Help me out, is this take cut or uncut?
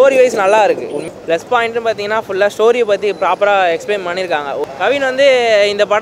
cut